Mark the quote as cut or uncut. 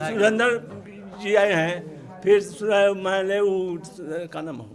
uncut